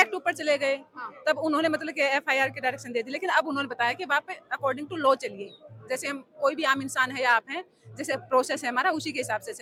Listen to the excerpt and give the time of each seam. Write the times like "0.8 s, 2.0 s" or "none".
none